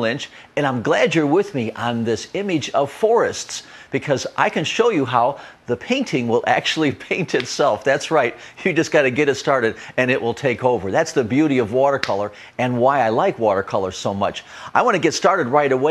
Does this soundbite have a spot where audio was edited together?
no; 0 cuts

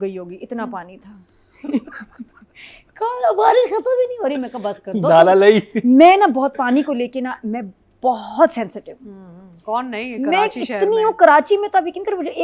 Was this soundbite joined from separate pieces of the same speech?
no; 0 cuts

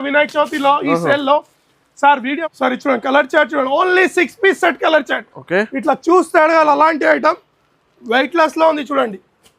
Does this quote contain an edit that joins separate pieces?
yes; 1 cut; at 2.4 s

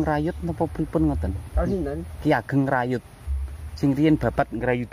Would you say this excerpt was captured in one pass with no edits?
yes; 0 cuts

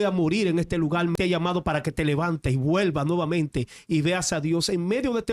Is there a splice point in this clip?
yes; 1 cut; at 1.1 s

